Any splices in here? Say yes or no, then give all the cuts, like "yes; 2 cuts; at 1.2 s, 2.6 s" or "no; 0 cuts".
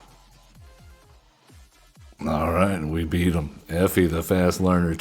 yes; 1 cut; at 1.2 s